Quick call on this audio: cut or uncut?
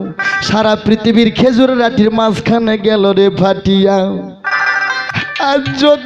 cut